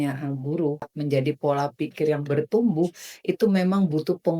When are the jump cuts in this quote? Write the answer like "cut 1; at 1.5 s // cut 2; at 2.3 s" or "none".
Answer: cut 1; at 0.9 s